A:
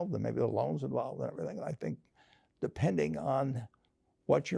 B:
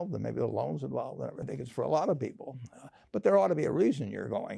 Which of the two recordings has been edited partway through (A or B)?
B